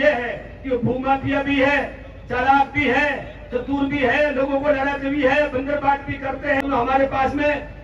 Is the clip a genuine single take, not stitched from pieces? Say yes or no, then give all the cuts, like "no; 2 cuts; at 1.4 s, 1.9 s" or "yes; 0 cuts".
no; 1 cut; at 6.6 s